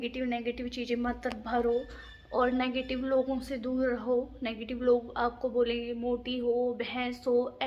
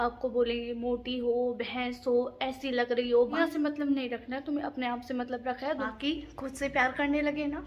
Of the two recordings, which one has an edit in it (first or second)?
second